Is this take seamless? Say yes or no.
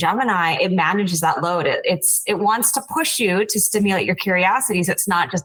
yes